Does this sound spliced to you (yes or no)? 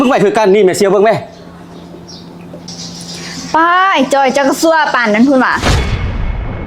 yes